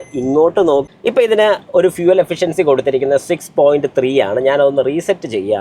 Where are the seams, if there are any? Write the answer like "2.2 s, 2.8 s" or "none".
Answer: 0.9 s